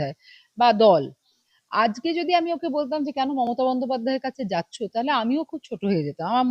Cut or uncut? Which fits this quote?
cut